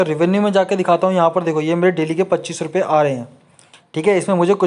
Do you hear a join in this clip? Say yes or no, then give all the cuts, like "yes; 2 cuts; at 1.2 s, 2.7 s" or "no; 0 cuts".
no; 0 cuts